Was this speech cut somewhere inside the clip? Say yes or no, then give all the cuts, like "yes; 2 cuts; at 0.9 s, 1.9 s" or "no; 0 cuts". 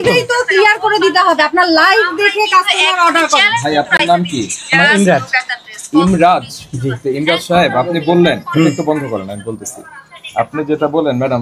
no; 0 cuts